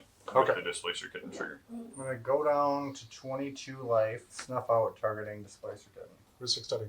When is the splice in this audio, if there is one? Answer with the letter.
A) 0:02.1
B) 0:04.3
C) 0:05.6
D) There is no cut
B